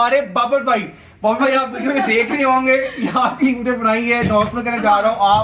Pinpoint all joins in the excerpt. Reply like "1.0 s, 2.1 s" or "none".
none